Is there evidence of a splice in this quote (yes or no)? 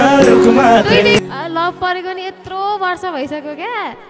yes